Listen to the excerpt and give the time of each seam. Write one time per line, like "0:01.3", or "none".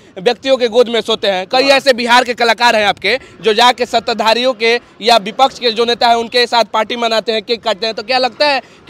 none